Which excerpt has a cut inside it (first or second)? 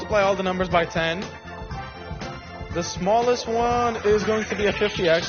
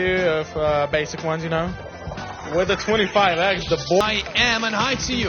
second